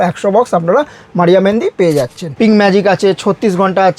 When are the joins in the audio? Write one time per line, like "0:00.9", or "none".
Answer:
0:02.2